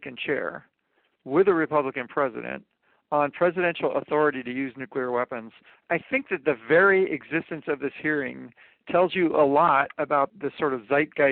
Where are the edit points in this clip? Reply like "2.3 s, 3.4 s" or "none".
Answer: 5.8 s, 10.3 s